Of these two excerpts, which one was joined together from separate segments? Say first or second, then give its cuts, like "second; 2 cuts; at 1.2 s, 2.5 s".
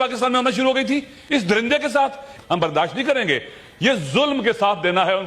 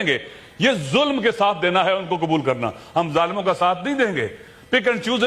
first; 1 cut; at 2.3 s